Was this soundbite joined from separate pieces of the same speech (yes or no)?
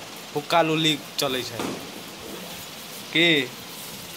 no